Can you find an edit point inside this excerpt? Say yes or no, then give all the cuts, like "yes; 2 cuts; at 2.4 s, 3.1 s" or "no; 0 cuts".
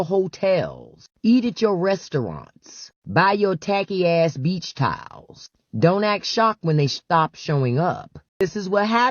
yes; 1 cut; at 8.2 s